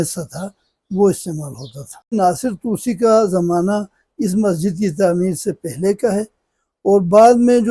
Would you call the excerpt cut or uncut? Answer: cut